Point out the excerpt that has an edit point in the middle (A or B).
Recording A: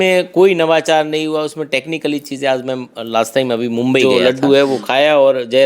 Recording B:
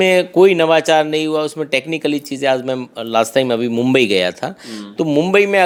A